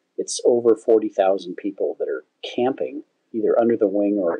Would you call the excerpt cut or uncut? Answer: cut